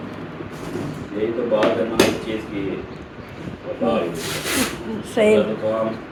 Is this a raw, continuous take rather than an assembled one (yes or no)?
yes